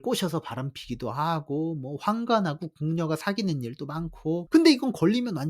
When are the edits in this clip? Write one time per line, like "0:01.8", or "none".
0:04.4